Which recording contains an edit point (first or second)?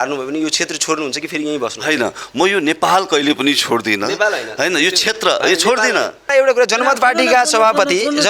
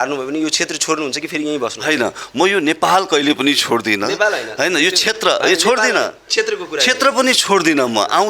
first